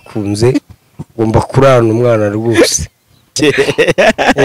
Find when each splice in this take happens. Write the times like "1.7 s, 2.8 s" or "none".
3.3 s